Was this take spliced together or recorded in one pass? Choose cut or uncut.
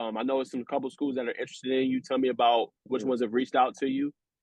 uncut